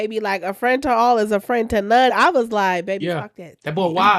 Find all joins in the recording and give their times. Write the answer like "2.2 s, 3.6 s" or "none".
2.1 s